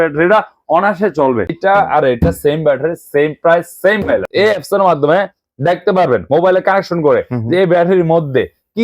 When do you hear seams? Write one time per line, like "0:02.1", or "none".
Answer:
0:01.5
0:04.3

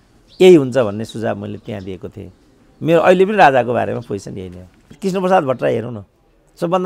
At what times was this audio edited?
0:04.9

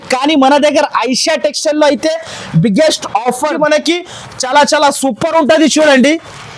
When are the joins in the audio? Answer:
0:03.5

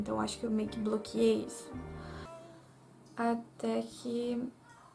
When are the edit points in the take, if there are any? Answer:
0:02.3

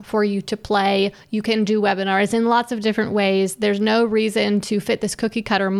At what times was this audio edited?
none

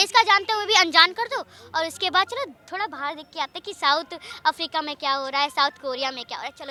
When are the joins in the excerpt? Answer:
none

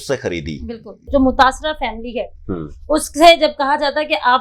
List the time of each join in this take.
0:01.1

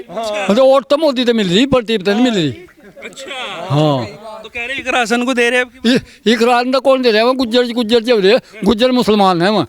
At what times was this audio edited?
none

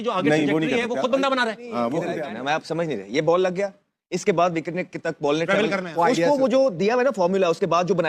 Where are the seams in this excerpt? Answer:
0:02.3

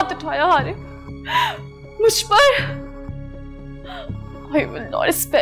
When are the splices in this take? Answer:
none

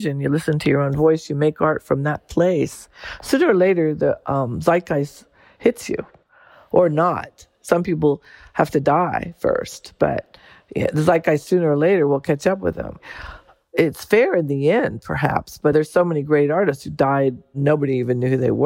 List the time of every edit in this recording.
0:06.4
0:13.7
0:15.7
0:17.5

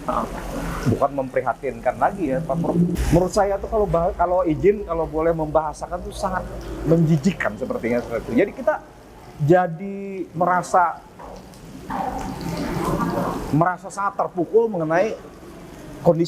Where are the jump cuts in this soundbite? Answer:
0:02.9

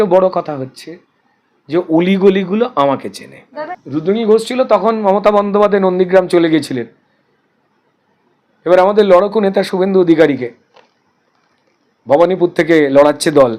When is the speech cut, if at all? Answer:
0:03.8

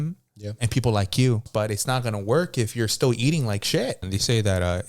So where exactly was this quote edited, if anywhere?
0:01.4
0:04.1

